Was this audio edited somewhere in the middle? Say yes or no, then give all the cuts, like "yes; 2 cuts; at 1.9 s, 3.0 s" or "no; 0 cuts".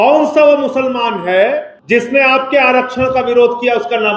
yes; 1 cut; at 1.7 s